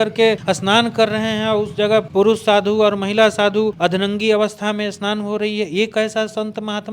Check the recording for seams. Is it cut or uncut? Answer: cut